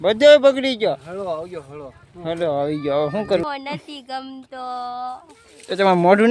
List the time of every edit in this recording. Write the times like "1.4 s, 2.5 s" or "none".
3.4 s

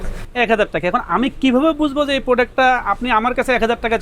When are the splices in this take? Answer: none

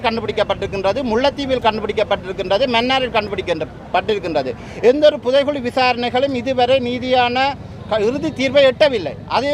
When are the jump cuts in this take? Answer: none

